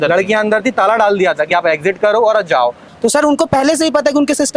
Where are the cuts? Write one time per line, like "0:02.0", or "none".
0:02.9